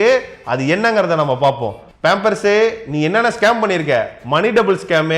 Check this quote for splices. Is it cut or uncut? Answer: cut